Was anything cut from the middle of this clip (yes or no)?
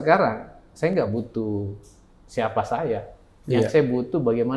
no